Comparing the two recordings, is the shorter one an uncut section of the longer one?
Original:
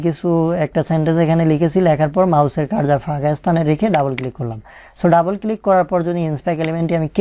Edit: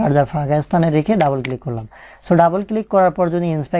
yes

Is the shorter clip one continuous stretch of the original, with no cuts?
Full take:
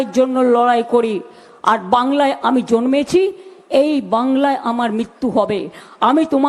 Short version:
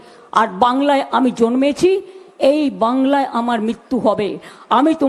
yes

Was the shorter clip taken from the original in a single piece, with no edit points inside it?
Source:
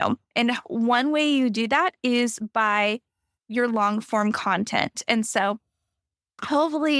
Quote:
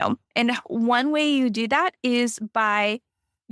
yes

